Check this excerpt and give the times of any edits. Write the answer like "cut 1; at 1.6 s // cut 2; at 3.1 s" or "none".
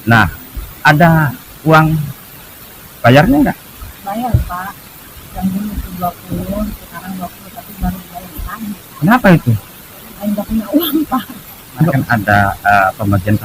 cut 1; at 11.9 s